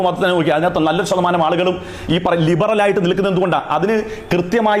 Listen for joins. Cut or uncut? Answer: uncut